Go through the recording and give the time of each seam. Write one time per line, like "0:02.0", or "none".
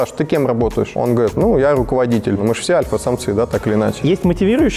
0:00.9
0:02.4
0:04.0